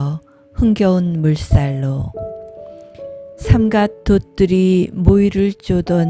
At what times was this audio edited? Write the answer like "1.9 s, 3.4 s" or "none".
none